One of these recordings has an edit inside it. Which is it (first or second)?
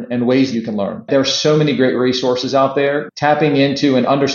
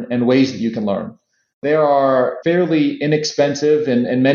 first